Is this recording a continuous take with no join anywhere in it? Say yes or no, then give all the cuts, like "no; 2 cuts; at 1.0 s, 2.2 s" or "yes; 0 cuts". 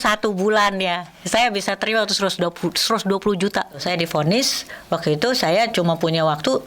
no; 1 cut; at 3.8 s